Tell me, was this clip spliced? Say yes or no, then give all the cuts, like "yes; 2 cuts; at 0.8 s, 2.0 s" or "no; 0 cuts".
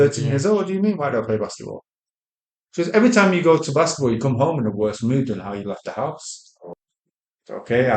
yes; 1 cut; at 6.7 s